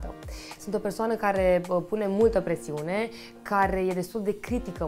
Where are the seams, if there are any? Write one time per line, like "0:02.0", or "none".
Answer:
none

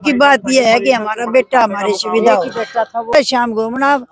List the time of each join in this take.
0:03.1

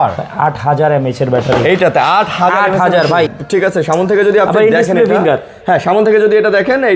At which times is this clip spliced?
0:03.4

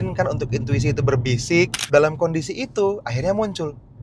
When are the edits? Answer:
0:01.8

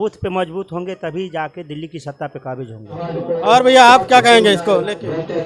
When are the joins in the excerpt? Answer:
0:03.0

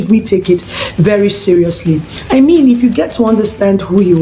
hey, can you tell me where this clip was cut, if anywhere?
0:02.1

